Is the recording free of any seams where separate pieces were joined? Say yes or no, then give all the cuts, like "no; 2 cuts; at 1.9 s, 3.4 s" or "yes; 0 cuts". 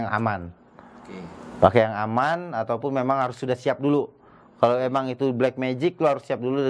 yes; 0 cuts